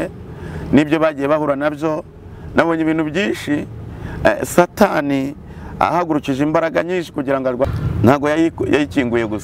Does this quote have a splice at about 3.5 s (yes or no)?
no